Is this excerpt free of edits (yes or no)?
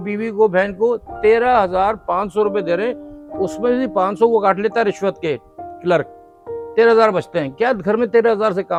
yes